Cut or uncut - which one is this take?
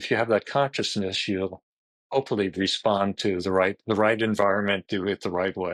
uncut